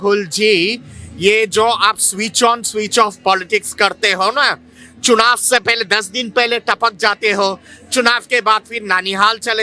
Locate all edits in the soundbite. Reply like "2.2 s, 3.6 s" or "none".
none